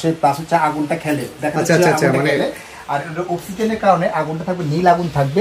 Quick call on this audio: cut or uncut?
uncut